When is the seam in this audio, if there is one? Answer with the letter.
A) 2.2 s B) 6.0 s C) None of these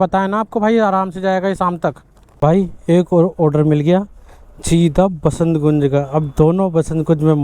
A